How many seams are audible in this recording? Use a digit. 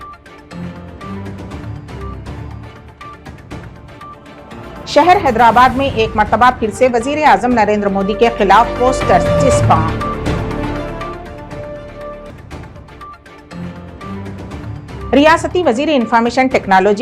1